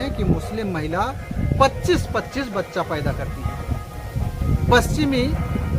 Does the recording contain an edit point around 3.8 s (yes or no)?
no